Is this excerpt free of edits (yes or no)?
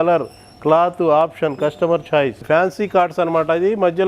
no